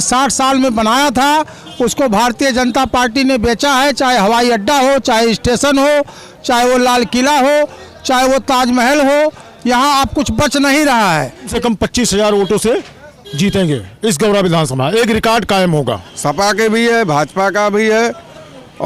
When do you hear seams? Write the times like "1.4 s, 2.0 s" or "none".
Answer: 11.5 s, 16.1 s